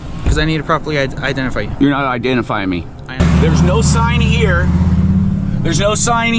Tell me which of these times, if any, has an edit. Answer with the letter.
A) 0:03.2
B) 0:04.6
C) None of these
A